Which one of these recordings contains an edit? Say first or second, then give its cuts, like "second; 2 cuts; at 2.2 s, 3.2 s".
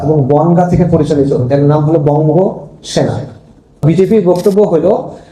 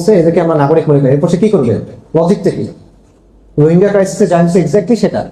first; 1 cut; at 3.8 s